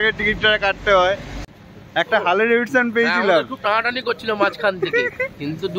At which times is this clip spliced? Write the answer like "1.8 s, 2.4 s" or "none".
1.4 s